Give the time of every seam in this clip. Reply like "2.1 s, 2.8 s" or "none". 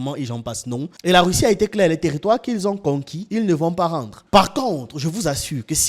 0.9 s, 4.1 s